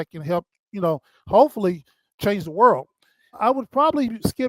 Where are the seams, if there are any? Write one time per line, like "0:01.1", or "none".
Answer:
0:02.1
0:03.4